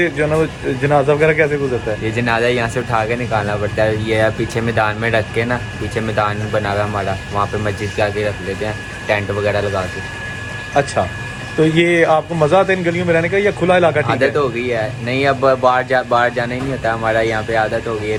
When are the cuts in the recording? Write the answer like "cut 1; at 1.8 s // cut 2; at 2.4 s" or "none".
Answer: none